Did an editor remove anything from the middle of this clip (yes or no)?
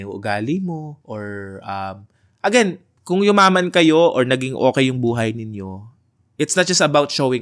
yes